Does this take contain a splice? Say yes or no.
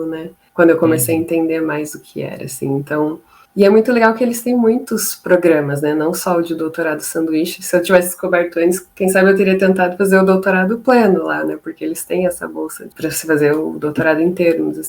no